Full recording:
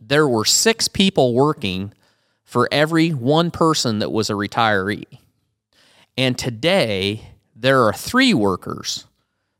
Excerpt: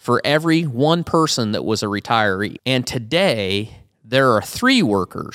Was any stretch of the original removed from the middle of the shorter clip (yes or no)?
yes